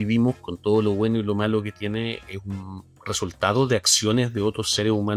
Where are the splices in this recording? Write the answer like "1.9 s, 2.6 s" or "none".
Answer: none